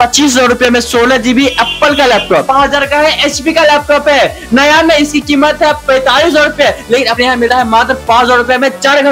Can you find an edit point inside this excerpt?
yes; 1 cut; at 2.4 s

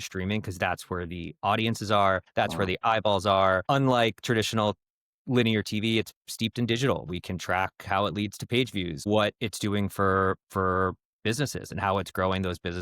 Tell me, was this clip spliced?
yes; 3 cuts; at 2.2 s, 3.6 s, 9.1 s

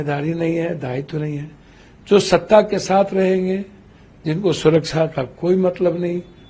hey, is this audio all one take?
yes; 0 cuts

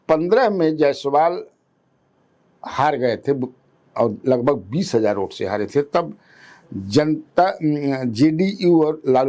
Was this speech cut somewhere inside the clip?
no; 0 cuts

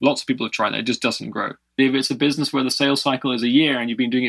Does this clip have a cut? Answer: yes; 1 cut; at 1.8 s

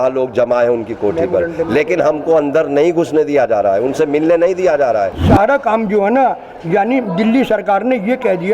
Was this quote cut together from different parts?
yes; 1 cut; at 5.2 s

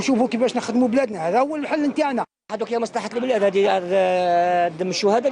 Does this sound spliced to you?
yes; 1 cut; at 2.5 s

